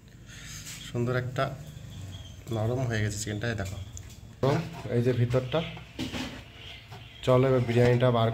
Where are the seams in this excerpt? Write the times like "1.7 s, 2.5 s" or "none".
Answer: 4.4 s